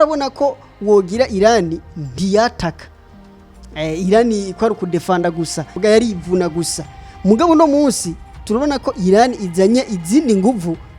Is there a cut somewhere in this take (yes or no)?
yes